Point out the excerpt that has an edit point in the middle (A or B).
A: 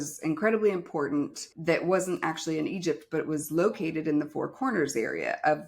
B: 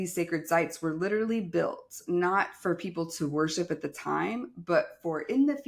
A